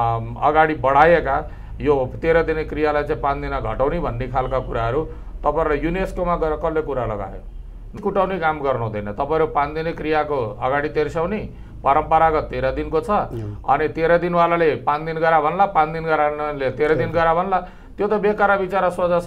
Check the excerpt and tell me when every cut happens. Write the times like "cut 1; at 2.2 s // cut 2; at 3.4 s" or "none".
cut 1; at 8.0 s